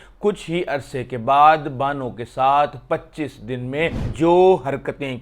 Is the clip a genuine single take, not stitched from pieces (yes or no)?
no